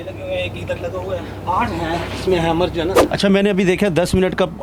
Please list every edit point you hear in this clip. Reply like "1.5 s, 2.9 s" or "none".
3.0 s